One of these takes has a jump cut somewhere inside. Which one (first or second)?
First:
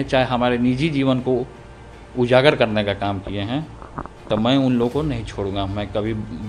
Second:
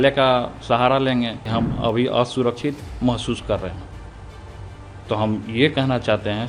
second